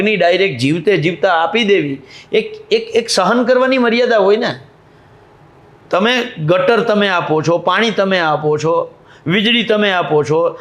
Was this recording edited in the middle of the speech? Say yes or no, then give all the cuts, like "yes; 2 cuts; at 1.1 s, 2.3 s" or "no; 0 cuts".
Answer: no; 0 cuts